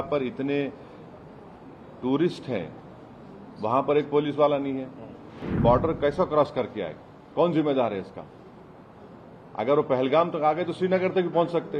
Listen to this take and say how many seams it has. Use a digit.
1